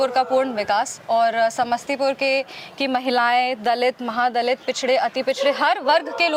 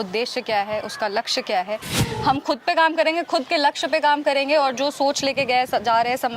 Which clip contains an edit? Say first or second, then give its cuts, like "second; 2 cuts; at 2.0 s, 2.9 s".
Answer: second; 1 cut; at 2.1 s